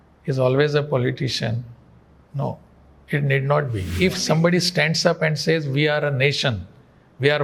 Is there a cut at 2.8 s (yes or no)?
no